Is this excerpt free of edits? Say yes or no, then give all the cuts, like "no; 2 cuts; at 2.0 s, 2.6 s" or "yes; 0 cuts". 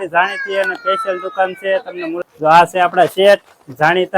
no; 1 cut; at 2.2 s